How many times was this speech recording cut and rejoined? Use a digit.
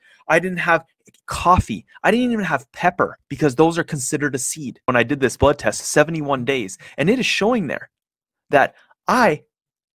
1